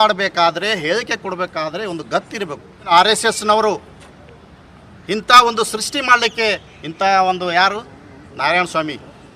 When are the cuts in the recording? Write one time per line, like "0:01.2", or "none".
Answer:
0:02.7